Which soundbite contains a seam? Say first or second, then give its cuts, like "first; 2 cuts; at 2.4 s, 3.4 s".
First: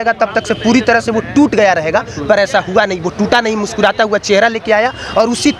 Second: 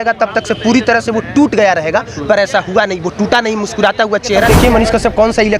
second; 1 cut; at 4.5 s